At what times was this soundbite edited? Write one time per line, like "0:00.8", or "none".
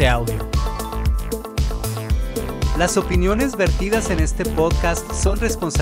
none